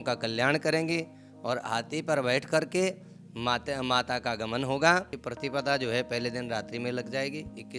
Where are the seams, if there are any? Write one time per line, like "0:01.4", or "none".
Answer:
0:05.2